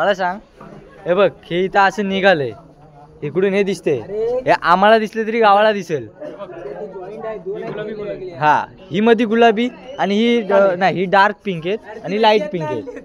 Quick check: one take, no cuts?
yes; 0 cuts

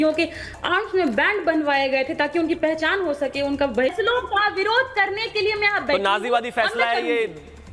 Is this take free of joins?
no; 1 cut; at 3.9 s

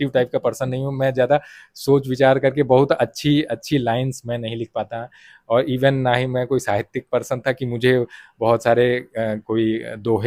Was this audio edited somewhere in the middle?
no; 0 cuts

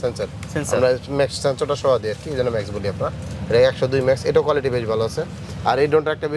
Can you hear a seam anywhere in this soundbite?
no; 0 cuts

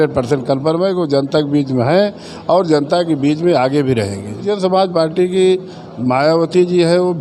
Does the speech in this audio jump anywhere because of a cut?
yes; 1 cut; at 4.4 s

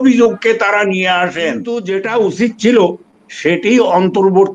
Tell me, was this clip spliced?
yes; 1 cut; at 1.7 s

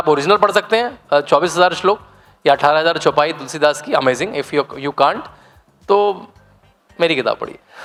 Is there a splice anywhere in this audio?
no; 0 cuts

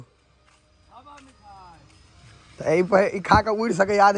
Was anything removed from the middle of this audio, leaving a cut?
no; 0 cuts

